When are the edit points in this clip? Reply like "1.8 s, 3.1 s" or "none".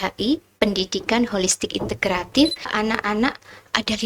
2.7 s